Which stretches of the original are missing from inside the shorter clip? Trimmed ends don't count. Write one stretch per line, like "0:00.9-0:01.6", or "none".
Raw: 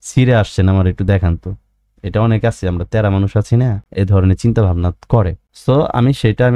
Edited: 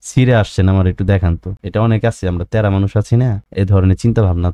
0:01.5-0:01.9